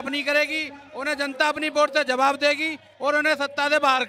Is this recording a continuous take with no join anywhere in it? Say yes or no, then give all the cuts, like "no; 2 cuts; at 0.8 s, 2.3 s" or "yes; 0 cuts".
yes; 0 cuts